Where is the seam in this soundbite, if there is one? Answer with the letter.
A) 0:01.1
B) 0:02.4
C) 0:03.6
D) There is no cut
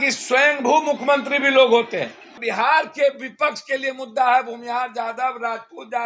B